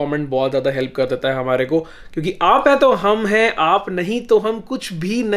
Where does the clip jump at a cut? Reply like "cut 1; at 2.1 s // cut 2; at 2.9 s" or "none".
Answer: none